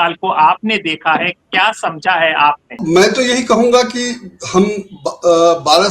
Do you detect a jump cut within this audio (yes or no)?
yes